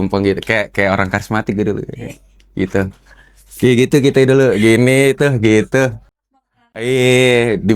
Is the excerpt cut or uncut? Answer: uncut